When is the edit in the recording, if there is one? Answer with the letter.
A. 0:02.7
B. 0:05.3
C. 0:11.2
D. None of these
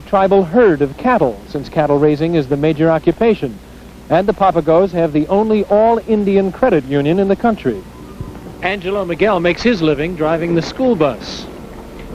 D